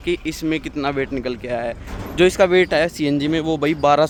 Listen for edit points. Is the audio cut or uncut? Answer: uncut